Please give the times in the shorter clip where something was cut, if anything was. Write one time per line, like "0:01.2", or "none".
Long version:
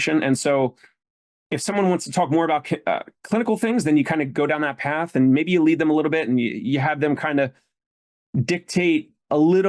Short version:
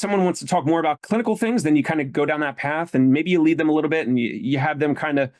0:01.0